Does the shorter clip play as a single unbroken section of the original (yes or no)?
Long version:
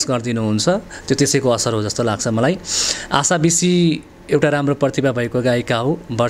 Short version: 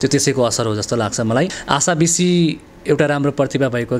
no